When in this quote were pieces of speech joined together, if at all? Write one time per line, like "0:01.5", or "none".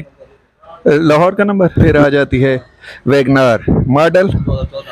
0:01.8